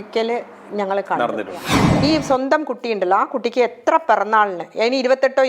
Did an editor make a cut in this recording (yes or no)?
yes